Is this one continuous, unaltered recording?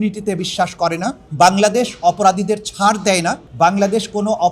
no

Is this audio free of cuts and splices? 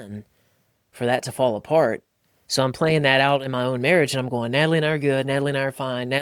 yes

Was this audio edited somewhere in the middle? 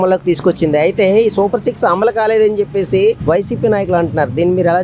yes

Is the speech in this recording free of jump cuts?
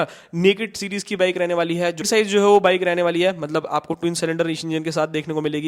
no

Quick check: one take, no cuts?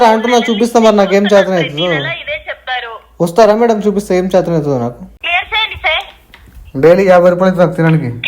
no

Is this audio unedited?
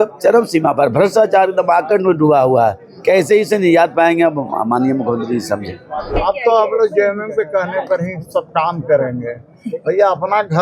no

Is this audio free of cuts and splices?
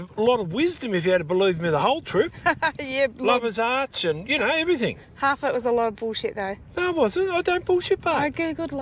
yes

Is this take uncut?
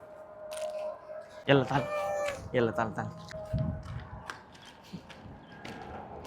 no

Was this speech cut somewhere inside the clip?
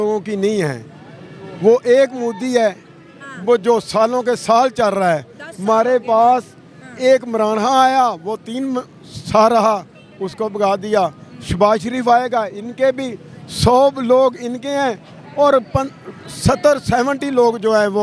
no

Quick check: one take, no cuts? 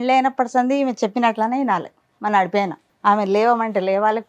no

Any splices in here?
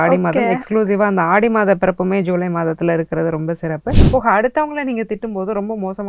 yes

